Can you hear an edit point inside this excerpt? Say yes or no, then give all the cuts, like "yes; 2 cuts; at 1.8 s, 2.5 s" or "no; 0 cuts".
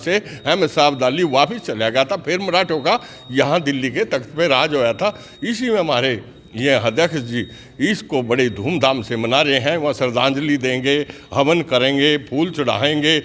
no; 0 cuts